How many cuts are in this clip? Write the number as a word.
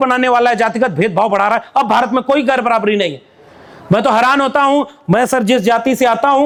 zero